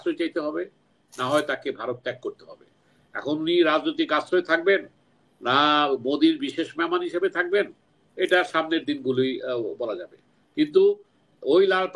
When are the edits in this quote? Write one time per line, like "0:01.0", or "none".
none